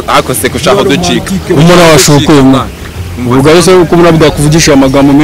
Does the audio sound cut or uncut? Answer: uncut